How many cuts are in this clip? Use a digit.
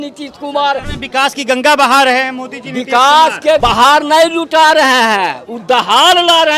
2